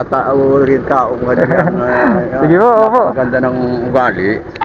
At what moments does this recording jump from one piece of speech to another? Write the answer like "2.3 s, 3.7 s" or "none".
none